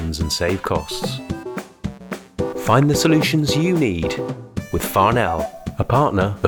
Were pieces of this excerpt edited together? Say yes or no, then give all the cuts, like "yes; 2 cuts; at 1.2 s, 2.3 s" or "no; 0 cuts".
no; 0 cuts